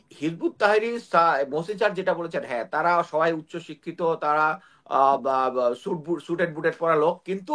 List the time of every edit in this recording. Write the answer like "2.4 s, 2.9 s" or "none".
none